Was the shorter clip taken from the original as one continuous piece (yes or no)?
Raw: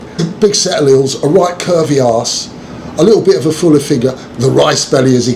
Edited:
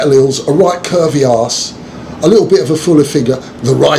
yes